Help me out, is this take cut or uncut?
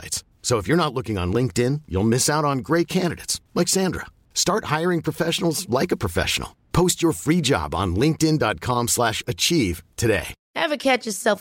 cut